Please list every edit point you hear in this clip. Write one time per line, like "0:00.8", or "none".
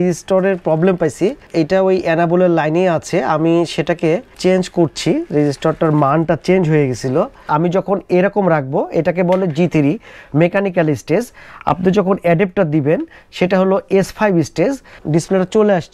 0:07.4
0:14.9

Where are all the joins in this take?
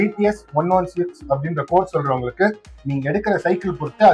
none

